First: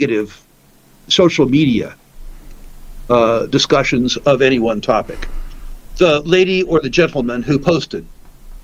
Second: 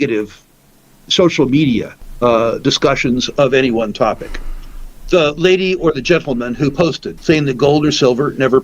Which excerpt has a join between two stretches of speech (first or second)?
second